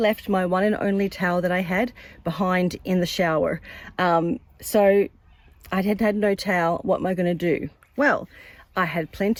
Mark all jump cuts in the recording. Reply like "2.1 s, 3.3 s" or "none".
none